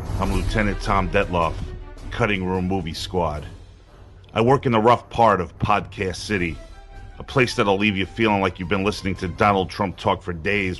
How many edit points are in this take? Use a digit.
1